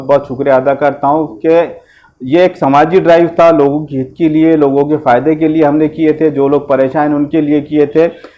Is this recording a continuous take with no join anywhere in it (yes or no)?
yes